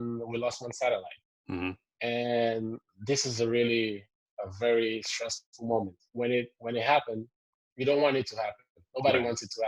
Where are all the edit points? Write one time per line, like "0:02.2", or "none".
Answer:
0:06.0